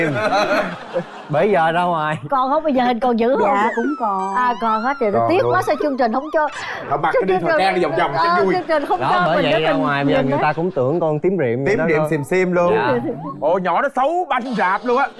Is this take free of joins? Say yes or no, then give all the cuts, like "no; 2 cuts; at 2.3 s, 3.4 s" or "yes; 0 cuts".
yes; 0 cuts